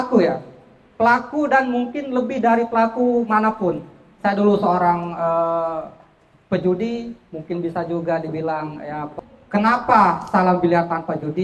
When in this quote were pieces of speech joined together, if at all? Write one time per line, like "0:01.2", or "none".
0:09.2